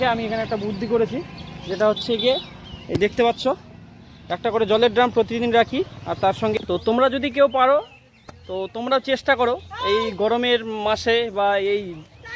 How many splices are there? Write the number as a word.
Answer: one